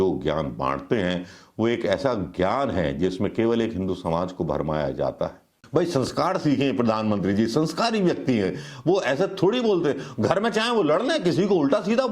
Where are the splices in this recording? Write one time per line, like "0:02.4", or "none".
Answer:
0:05.6